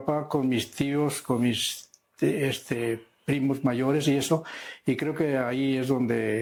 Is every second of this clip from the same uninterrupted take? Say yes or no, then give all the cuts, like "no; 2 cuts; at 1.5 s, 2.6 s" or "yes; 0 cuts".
yes; 0 cuts